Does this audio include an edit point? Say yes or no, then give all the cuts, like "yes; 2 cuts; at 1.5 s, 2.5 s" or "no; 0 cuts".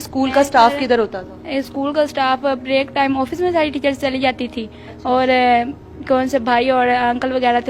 no; 0 cuts